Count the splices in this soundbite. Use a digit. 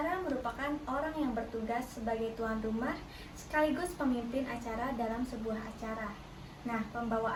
0